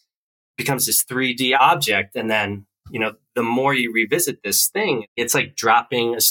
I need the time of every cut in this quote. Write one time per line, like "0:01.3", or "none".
0:01.6
0:05.1

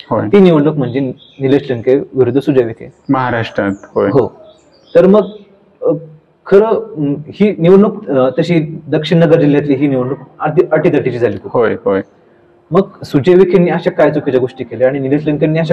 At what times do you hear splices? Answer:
none

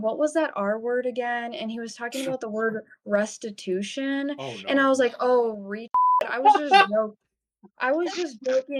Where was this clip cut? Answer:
none

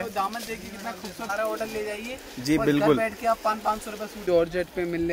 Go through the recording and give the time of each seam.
0:01.3
0:04.2

